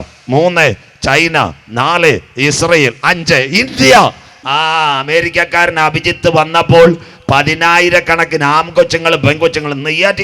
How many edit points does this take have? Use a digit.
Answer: 1